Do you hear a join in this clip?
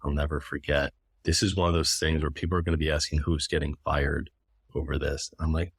no; 0 cuts

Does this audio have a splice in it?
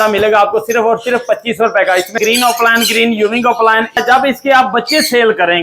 yes; 2 cuts; at 2.2 s, 4.0 s

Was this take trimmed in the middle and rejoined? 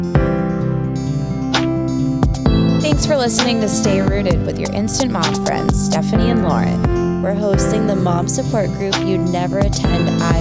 no; 0 cuts

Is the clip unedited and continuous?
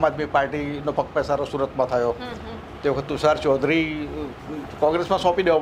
yes; 0 cuts

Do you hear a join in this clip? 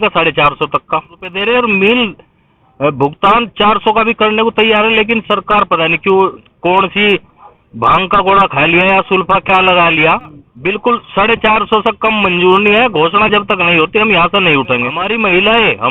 yes; 4 cuts; at 1.3 s, 6.5 s, 10.5 s, 15.0 s

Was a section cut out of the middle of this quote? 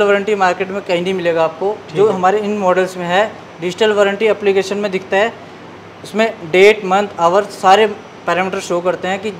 no; 0 cuts

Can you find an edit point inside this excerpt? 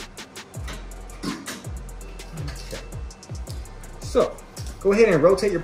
no; 0 cuts

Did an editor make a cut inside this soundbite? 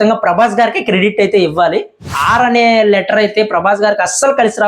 yes; 1 cut; at 2.1 s

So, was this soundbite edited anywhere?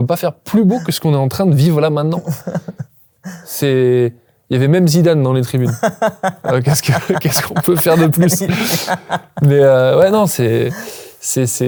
no; 0 cuts

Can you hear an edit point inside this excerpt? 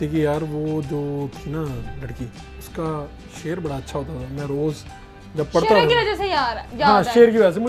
no; 0 cuts

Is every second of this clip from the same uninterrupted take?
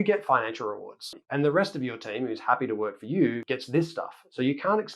no; 1 cut; at 1.2 s

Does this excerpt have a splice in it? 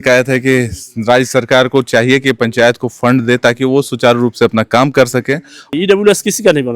yes; 1 cut; at 5.7 s

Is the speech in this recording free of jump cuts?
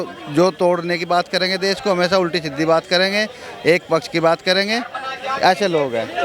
yes; 0 cuts

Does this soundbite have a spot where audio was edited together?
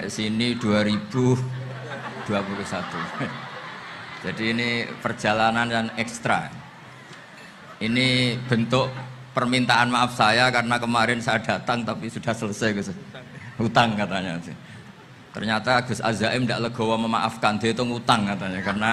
no; 0 cuts

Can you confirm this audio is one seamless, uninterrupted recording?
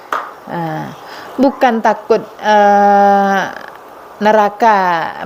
yes; 0 cuts

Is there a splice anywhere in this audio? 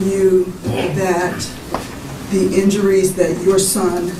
no; 0 cuts

